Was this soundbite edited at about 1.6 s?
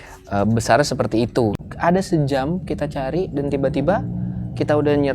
yes; 1 cut; at 1.6 s

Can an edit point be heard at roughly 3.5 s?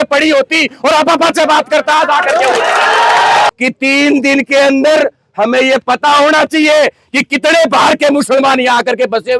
yes; 1 cut; at 3.5 s

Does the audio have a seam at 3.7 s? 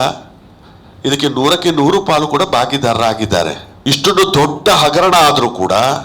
yes; 1 cut; at 3.7 s

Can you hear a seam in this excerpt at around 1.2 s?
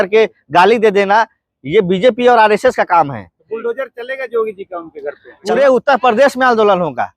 no; 1 cut; at 5.3 s

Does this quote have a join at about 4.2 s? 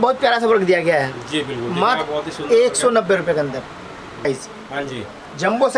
yes; 1 cut; at 4.2 s

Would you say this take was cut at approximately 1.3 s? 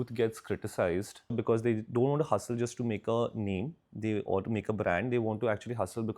yes; 1 cut; at 1.3 s

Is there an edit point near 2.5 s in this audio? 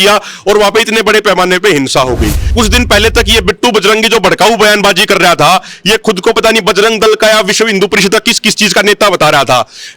yes; 1 cut; at 2.5 s

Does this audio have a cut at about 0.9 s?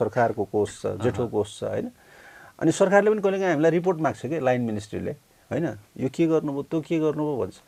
no; 0 cuts

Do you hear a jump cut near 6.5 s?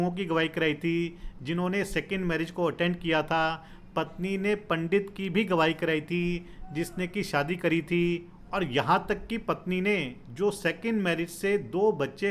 no; 0 cuts

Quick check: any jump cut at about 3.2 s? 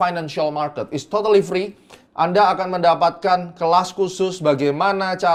no; 0 cuts

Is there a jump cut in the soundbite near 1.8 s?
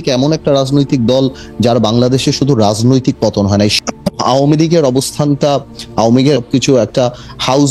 no; 2 cuts; at 3.8 s, 6.4 s

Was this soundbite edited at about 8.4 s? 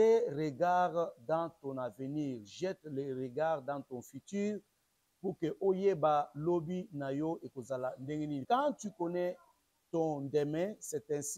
yes; 1 cut; at 8.4 s

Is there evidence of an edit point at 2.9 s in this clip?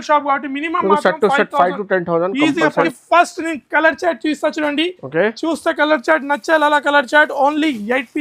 yes; 1 cut; at 2.9 s

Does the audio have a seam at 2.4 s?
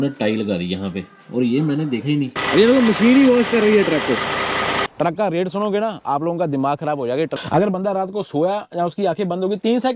yes; 3 cuts; at 2.4 s, 4.9 s, 7.4 s

